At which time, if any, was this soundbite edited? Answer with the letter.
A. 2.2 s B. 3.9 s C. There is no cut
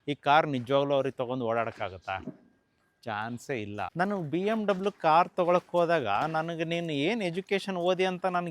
B